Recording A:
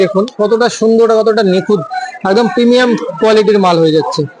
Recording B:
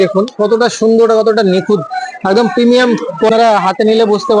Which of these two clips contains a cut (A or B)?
B